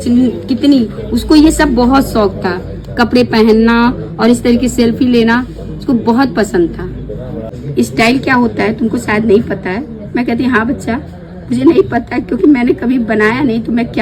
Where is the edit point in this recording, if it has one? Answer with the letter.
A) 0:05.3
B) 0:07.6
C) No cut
B